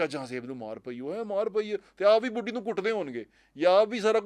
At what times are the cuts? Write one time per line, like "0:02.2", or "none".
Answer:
none

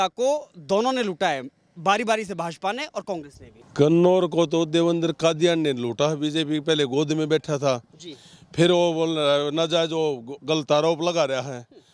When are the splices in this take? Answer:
none

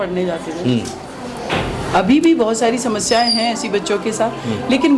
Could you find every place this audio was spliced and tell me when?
none

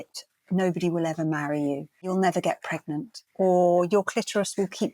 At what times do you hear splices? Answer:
0:02.1
0:03.2

